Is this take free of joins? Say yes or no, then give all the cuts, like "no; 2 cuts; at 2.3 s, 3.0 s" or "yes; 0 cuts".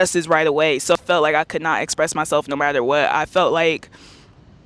no; 1 cut; at 1.0 s